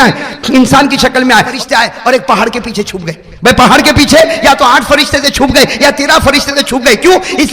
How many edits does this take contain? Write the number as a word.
one